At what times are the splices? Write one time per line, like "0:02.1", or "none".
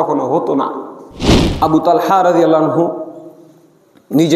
0:01.4